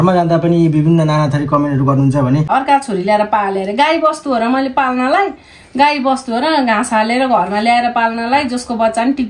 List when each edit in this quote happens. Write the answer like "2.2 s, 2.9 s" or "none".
2.5 s